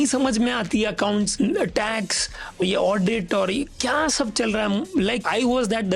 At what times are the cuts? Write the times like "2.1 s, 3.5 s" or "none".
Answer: 1.3 s, 2.6 s, 5.2 s